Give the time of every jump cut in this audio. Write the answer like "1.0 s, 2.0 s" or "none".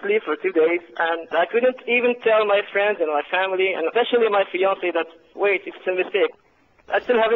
1.3 s, 5.2 s, 6.4 s